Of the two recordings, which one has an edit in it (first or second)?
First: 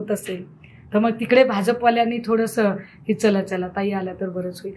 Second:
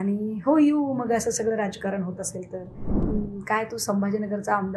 second